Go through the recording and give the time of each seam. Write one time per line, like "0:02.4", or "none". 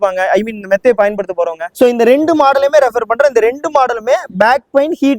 0:01.6